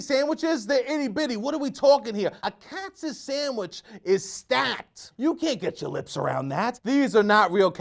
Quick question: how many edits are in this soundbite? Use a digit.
1